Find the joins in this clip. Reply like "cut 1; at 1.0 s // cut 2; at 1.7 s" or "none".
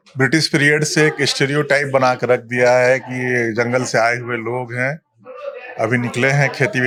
none